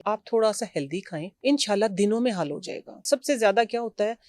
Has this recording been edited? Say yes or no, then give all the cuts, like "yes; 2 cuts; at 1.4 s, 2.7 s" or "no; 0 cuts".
yes; 2 cuts; at 1.3 s, 3.0 s